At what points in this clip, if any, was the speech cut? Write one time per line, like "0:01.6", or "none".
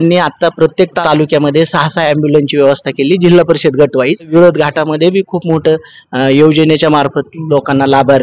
0:01.0
0:04.3

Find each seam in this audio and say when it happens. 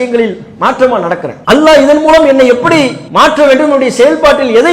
0:01.3
0:03.0

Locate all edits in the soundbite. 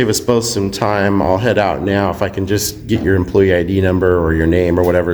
none

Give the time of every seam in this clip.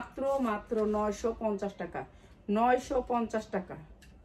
none

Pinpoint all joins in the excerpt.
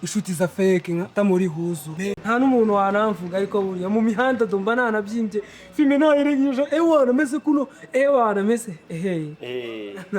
0:01.9

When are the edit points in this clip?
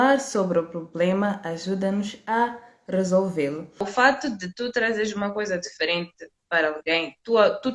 0:03.8

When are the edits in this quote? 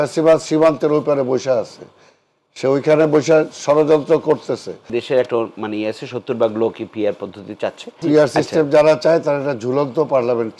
0:04.9
0:08.0

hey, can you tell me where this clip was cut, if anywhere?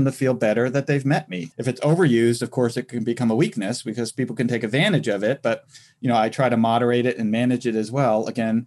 0:01.4

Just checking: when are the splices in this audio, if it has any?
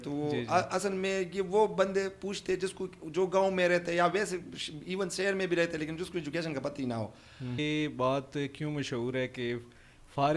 0:07.6

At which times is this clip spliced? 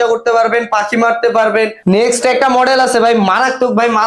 0:01.8

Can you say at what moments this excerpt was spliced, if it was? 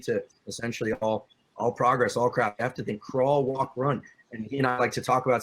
0:01.4
0:04.1

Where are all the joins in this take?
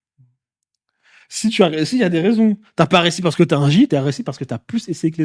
0:03.9

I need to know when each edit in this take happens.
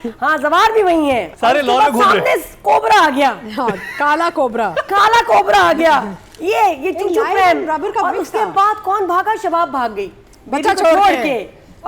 0:01.3

